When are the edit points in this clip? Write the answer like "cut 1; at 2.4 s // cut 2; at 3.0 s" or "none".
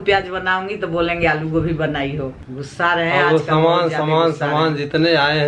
cut 1; at 2.4 s